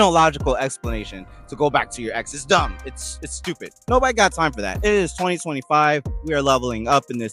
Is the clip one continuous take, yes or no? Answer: no